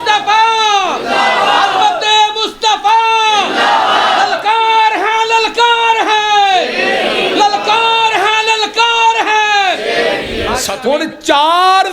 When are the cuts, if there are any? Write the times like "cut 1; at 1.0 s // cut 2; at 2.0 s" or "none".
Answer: cut 1; at 10.7 s